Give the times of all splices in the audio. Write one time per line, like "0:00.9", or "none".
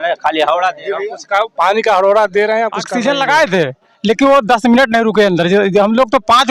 0:02.8